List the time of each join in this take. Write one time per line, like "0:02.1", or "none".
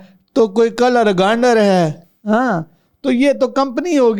none